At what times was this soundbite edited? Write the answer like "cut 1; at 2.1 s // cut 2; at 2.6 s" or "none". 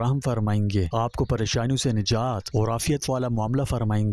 cut 1; at 0.9 s // cut 2; at 2.4 s